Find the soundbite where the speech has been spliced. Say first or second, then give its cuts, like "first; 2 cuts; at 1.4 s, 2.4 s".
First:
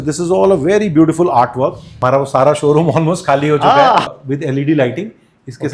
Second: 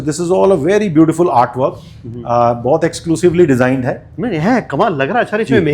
first; 2 cuts; at 1.9 s, 4.1 s